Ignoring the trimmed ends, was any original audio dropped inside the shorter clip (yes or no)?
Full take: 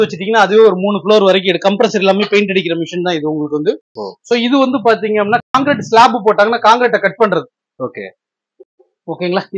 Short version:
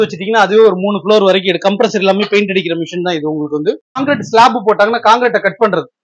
yes